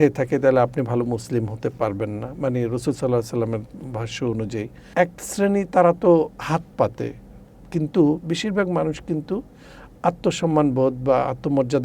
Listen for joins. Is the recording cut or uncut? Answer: cut